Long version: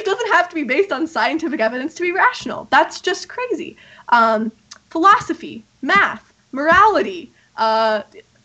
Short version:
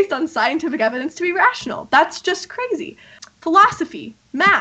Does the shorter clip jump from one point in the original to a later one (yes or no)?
yes